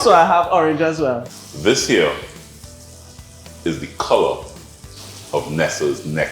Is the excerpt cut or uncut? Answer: cut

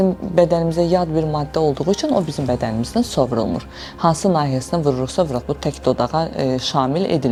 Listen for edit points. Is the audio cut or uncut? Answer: uncut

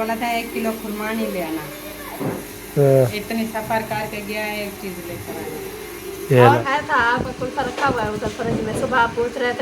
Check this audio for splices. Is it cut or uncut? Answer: cut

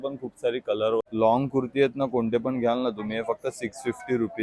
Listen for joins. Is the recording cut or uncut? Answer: cut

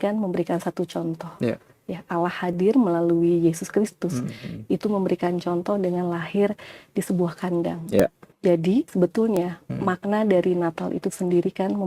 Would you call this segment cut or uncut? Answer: cut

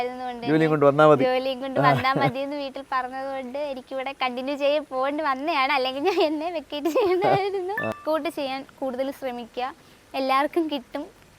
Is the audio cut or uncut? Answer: cut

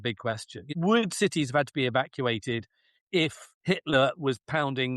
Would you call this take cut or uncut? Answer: cut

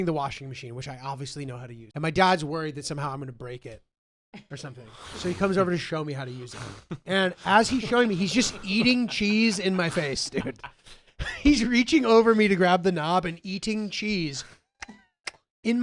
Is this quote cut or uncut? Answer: cut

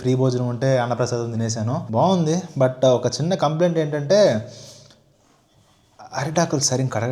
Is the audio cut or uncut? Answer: uncut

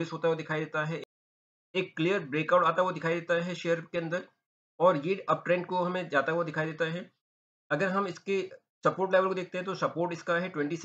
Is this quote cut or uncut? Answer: cut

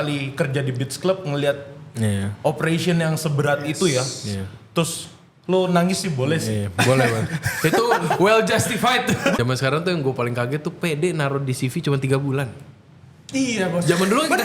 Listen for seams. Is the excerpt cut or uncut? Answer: cut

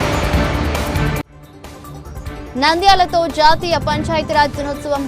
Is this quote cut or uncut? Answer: cut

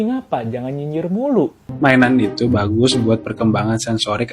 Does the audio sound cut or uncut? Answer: cut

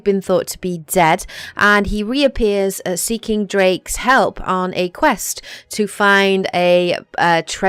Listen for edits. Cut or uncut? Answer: uncut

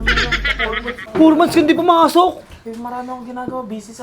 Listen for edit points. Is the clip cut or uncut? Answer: cut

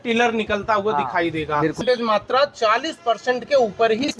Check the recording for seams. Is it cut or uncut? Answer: cut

